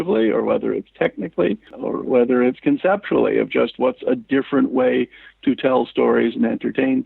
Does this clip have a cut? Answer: yes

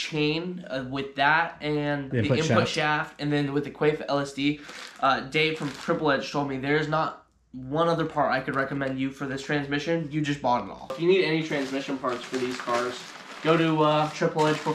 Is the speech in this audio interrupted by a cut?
yes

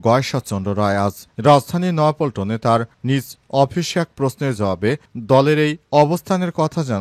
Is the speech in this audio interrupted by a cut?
no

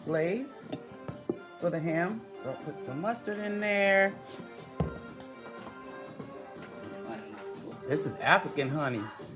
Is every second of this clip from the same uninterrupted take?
yes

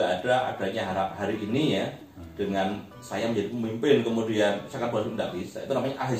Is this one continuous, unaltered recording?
yes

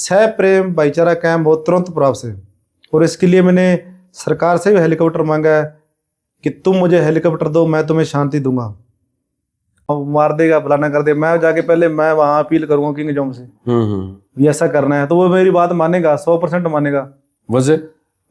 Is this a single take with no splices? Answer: no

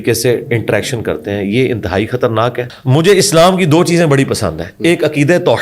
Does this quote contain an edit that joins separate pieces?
yes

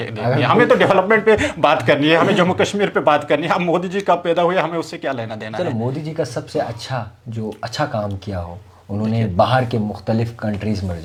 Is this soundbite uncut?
yes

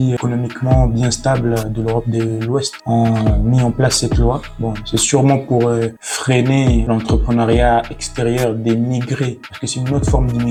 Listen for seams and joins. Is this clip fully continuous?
yes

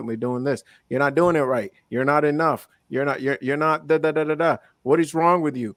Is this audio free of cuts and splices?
yes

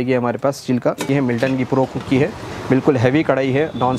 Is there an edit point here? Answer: yes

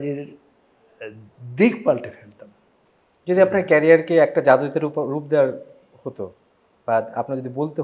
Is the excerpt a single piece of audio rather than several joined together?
yes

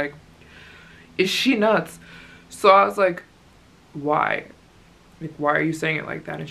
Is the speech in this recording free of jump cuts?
yes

